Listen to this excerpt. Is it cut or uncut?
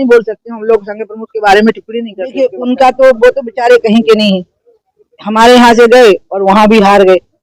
cut